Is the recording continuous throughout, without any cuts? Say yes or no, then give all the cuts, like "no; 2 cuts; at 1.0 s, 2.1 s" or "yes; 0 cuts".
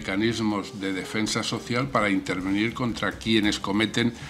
yes; 0 cuts